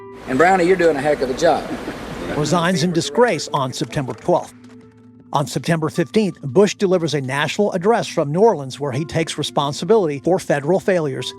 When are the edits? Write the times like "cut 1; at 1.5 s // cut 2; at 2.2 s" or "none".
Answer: cut 1; at 6.4 s // cut 2; at 10.2 s